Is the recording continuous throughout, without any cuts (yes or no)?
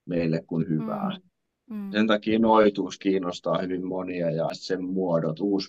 no